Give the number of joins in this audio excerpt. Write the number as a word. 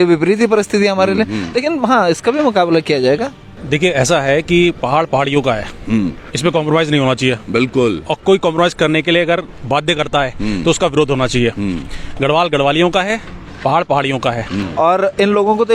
two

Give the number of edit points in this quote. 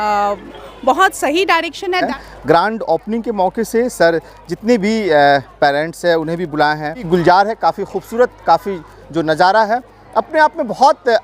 two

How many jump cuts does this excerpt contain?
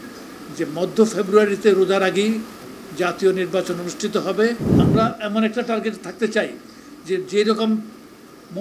one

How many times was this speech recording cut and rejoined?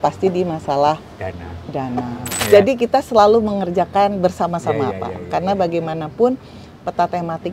one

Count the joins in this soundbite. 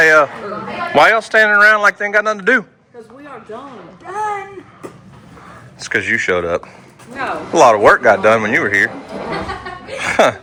zero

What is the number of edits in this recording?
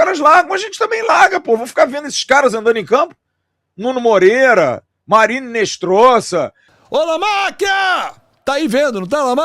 one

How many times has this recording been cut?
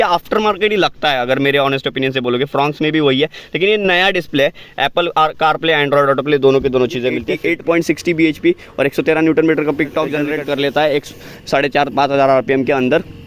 two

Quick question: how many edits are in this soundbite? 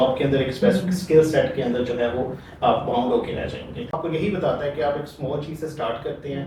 one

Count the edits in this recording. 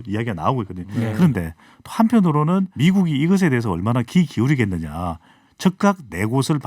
one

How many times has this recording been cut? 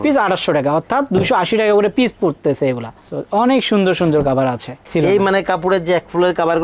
one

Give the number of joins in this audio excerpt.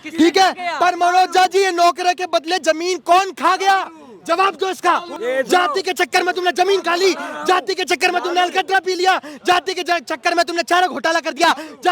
one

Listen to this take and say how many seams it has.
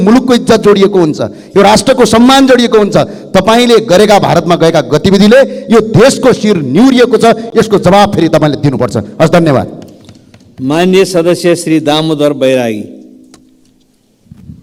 zero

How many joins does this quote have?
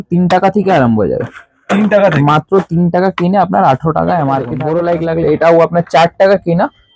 one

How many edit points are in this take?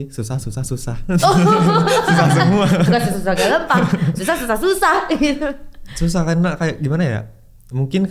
zero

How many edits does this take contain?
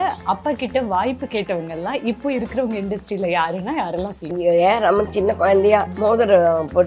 two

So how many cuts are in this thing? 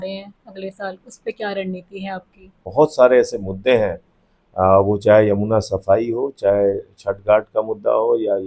one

